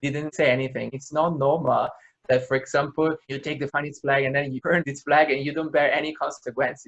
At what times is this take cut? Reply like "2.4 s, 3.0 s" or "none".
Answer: 1.0 s